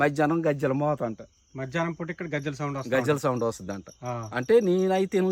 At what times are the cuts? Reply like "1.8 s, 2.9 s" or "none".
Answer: none